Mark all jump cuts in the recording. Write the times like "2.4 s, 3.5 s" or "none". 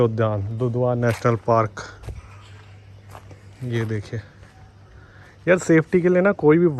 none